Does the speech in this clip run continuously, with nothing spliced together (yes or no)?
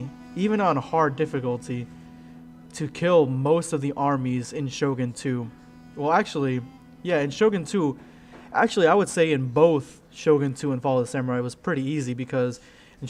yes